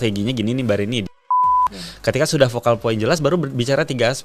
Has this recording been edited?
yes; 1 cut; at 1.3 s

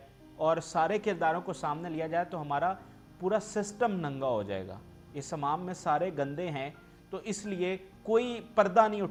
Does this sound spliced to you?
no; 0 cuts

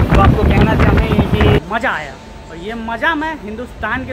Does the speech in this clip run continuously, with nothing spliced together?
no; 1 cut; at 1.6 s

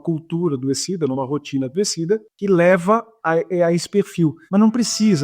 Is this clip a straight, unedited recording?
no; 2 cuts; at 2.3 s, 4.4 s

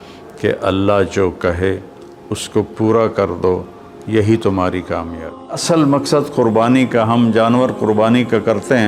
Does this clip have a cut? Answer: yes; 1 cut; at 5.6 s

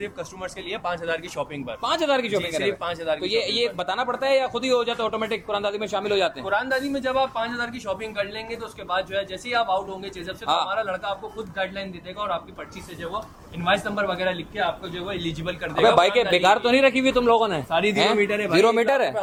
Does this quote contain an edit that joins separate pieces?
no; 0 cuts

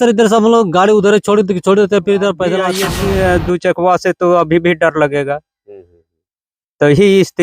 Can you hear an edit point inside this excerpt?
yes; 1 cut; at 2.7 s

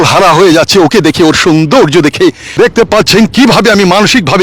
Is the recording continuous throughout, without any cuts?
no; 1 cut; at 2.4 s

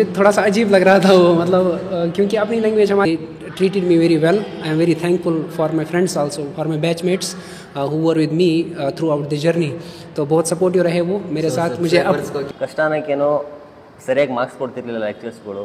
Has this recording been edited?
yes; 2 cuts; at 3.1 s, 12.4 s

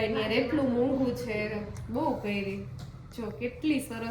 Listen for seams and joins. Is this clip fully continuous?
yes; 0 cuts

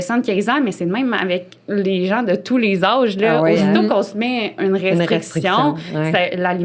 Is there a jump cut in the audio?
no; 0 cuts

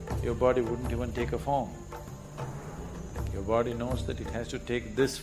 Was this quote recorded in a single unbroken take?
no; 1 cut; at 2.1 s

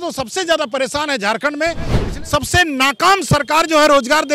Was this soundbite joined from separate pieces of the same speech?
yes; 1 cut; at 2.0 s

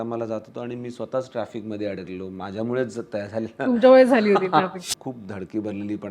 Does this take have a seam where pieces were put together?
yes; 1 cut; at 4.8 s

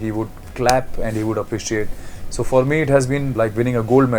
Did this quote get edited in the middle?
yes; 1 cut; at 3.3 s

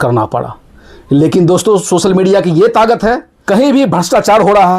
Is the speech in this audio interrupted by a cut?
yes; 1 cut; at 3.3 s

